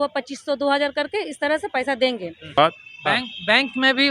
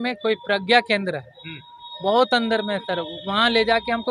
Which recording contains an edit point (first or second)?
first